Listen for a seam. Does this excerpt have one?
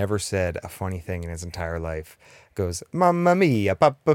no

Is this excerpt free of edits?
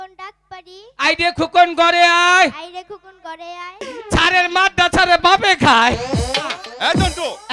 no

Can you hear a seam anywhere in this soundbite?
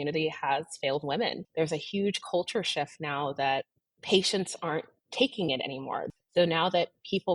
yes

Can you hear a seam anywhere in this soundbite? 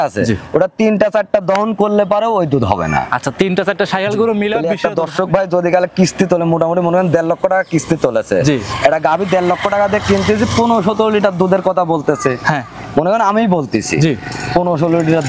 yes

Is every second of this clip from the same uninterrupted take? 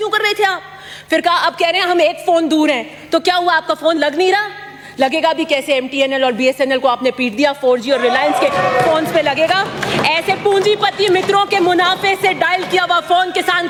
yes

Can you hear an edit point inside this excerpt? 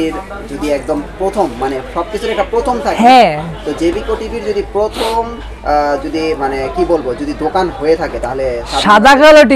no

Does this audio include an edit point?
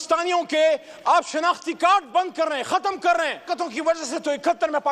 yes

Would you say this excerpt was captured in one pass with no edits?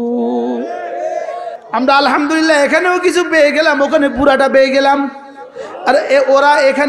no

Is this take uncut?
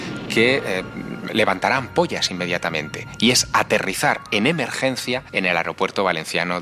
no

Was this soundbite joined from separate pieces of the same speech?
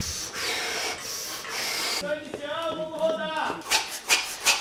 no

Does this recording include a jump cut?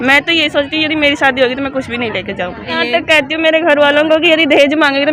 yes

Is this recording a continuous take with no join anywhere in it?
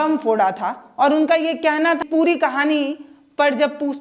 no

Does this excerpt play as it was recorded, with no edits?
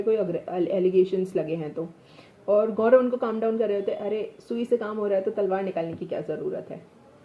yes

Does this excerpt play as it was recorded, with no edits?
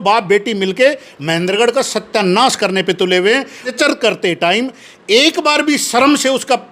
no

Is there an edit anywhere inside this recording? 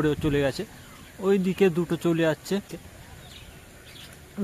yes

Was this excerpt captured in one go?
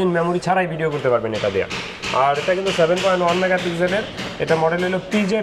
yes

